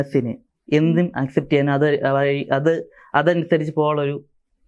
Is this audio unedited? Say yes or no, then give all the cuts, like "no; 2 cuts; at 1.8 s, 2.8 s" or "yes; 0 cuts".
yes; 0 cuts